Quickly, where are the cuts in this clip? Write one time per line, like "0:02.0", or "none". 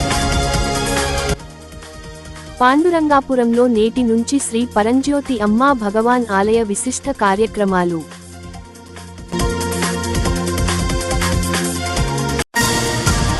0:12.5